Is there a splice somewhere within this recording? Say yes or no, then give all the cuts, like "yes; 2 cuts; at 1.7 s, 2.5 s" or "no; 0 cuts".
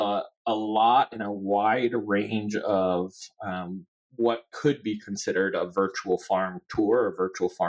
no; 0 cuts